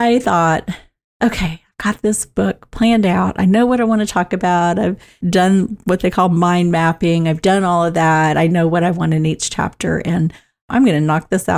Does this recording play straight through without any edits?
yes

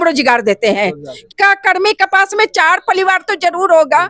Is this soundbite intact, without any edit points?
no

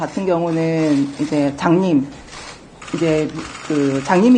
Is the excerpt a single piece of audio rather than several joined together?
yes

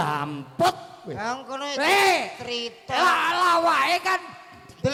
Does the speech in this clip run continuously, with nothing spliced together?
yes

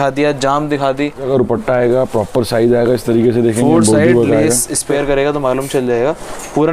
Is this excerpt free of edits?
no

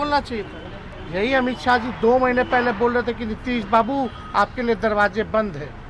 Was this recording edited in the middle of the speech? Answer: no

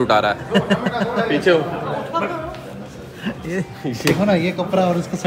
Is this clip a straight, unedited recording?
yes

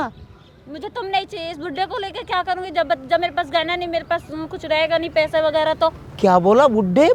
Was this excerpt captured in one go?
yes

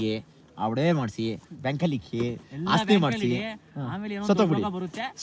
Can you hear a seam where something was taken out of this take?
no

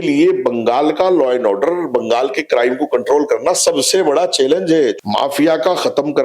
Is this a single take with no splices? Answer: no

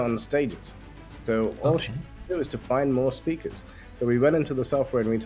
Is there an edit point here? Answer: no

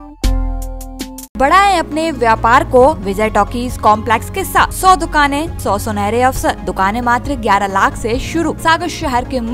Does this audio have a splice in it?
yes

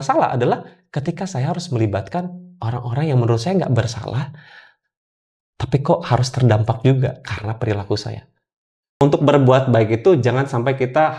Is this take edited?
yes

